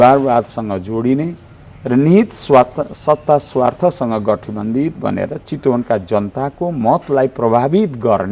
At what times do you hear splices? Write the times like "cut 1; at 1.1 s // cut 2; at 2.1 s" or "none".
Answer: none